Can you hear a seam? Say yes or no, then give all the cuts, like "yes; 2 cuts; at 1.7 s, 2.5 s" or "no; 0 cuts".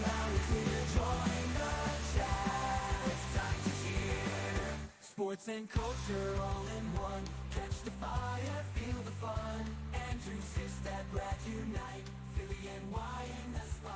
no; 0 cuts